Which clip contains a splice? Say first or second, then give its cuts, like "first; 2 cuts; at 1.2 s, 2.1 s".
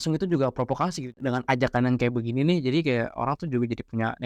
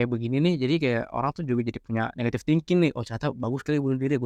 first; 1 cut; at 1.1 s